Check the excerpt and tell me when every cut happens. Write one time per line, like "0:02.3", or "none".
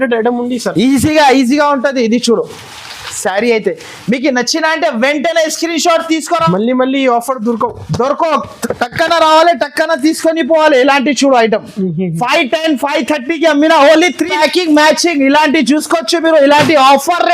0:06.4
0:14.3